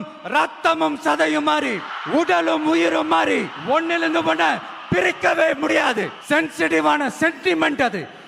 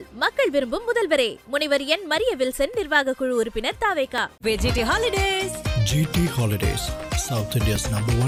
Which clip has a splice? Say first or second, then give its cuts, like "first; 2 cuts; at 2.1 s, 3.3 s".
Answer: first; 3 cuts; at 1.9 s, 3.5 s, 6.2 s